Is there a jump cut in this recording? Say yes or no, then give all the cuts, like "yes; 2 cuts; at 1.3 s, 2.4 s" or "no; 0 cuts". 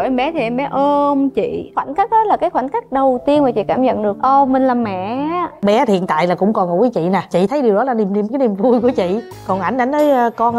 yes; 3 cuts; at 1.6 s, 4.2 s, 5.6 s